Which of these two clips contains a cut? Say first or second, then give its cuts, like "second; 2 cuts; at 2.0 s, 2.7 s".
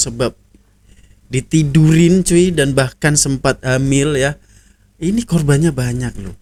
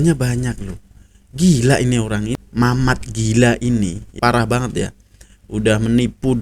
second; 2 cuts; at 2.2 s, 4.1 s